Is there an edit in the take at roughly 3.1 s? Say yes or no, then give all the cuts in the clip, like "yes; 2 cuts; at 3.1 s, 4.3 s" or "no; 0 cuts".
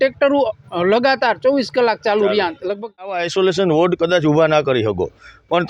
yes; 1 cut; at 3.1 s